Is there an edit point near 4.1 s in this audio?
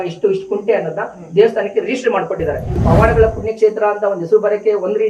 no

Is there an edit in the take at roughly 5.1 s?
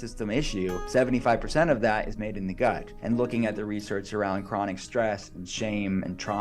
no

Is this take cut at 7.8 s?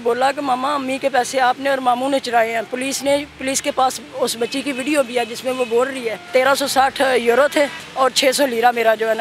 yes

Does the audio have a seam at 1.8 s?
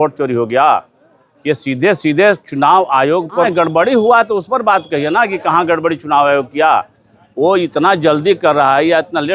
no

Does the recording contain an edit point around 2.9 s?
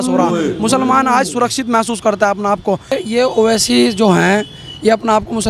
yes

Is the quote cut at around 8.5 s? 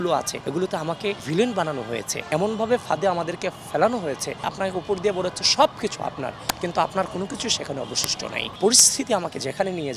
yes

